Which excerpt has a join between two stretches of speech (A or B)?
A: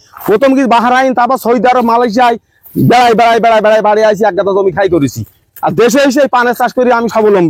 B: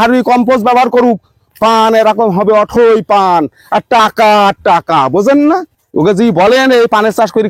B